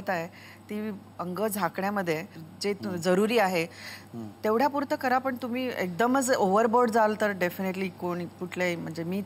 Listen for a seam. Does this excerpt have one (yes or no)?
yes